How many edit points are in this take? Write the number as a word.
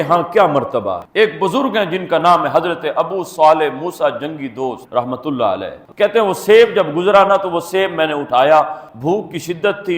two